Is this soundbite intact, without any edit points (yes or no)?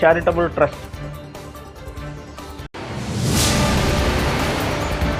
yes